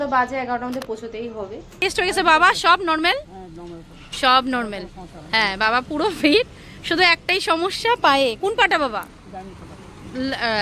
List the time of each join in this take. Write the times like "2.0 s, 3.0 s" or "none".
1.8 s

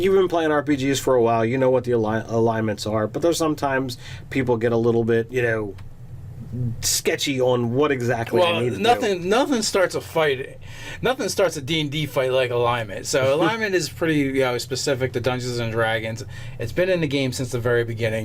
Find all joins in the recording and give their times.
2.6 s

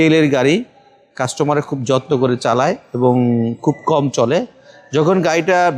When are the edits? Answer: none

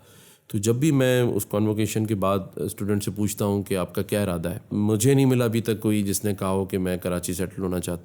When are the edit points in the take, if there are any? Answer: 4.7 s

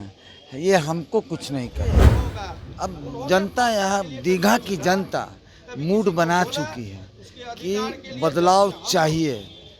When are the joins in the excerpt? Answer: 2.1 s

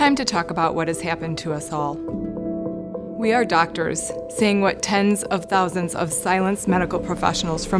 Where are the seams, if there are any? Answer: none

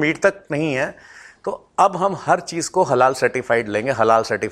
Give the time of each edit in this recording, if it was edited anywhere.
none

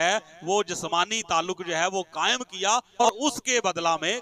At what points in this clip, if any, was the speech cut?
3.0 s

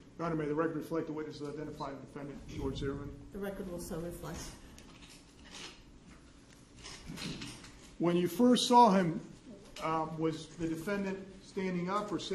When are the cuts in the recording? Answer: none

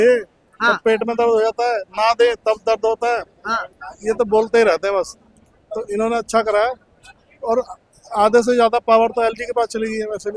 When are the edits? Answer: none

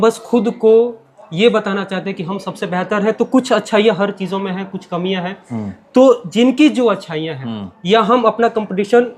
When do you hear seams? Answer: none

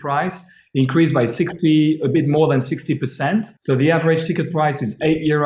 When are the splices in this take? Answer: 3.5 s

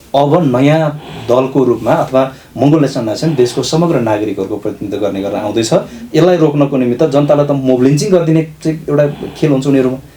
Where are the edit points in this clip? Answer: none

